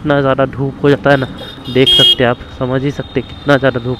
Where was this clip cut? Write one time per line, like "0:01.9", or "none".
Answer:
none